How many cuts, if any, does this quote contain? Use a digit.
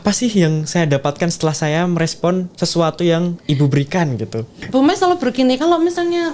1